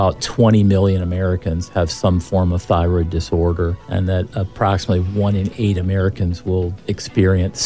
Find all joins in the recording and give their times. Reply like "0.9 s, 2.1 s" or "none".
none